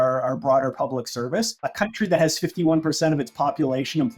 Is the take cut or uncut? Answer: cut